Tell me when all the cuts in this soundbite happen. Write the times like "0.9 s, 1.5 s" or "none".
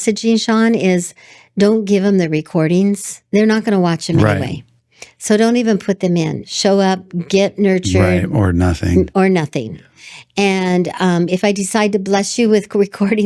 3.2 s, 6.5 s